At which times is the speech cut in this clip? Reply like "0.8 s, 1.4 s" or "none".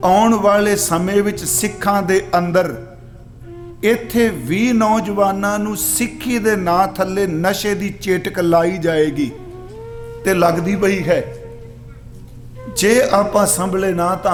none